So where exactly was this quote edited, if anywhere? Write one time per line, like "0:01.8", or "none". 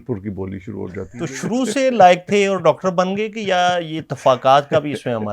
0:01.0